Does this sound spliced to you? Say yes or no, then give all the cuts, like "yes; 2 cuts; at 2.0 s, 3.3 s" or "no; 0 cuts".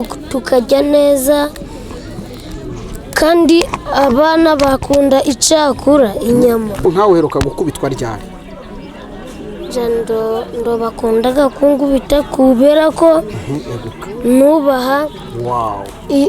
yes; 1 cut; at 6.9 s